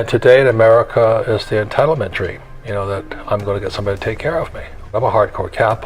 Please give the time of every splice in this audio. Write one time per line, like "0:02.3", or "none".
0:05.0